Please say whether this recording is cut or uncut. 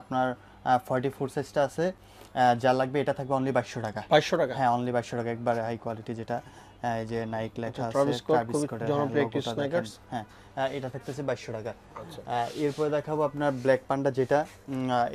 uncut